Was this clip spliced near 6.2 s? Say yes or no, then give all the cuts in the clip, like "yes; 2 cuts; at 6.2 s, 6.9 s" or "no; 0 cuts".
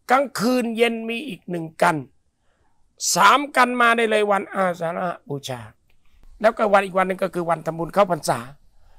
yes; 1 cut; at 6.2 s